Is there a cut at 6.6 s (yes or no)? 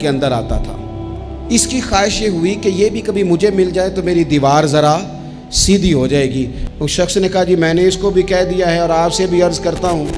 yes